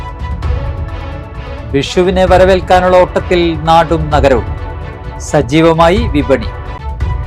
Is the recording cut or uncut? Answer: cut